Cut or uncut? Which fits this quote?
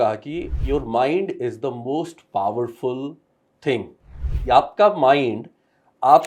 cut